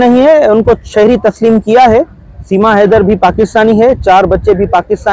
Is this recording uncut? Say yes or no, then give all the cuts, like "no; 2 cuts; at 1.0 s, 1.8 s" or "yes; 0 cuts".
yes; 0 cuts